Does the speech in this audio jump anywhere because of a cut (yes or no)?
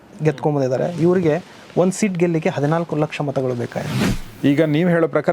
yes